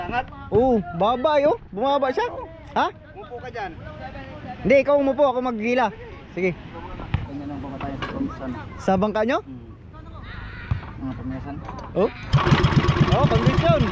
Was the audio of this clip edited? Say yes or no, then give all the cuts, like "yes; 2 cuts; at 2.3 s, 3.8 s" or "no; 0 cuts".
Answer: yes; 1 cut; at 7.3 s